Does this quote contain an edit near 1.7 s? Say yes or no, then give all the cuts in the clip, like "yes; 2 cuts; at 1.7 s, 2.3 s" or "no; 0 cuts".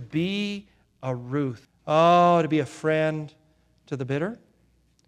yes; 1 cut; at 1.7 s